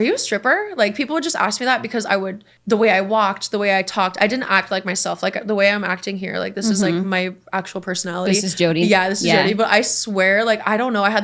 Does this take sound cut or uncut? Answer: uncut